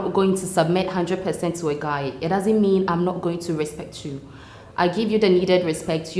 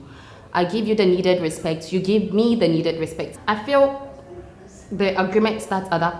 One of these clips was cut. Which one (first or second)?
second